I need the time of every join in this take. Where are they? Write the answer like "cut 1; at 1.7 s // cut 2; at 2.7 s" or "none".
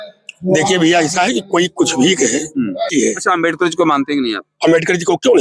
cut 1; at 2.9 s